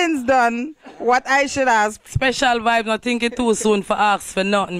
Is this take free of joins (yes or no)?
no